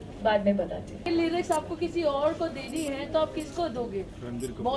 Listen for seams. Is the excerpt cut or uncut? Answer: cut